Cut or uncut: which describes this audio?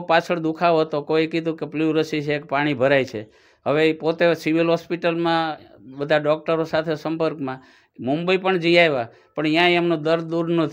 uncut